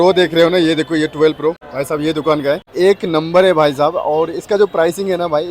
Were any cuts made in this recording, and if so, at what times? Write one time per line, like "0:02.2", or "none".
0:01.7
0:02.7